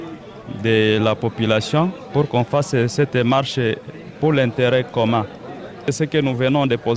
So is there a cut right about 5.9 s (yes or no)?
yes